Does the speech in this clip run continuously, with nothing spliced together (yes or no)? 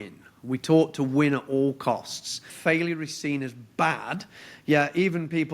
no